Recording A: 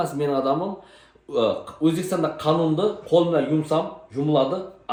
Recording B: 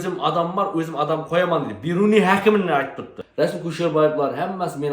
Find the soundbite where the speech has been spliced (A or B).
B